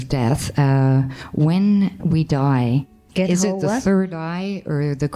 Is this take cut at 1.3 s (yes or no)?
no